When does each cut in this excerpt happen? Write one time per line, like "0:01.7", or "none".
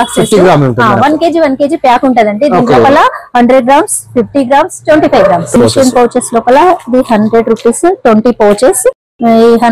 0:05.6